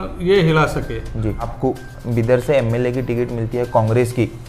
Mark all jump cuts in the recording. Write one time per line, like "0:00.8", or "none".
0:01.5